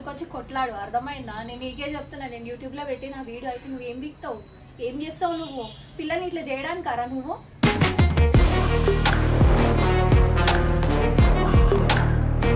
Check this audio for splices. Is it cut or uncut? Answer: uncut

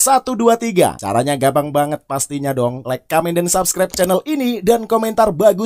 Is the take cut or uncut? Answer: cut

